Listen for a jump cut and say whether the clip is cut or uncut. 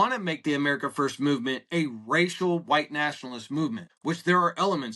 cut